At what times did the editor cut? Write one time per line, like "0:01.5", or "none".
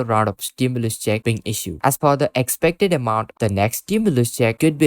0:01.7
0:03.3